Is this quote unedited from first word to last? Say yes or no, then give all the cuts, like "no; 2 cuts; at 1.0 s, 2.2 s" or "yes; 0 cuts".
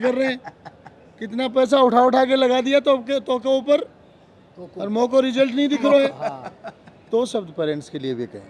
yes; 0 cuts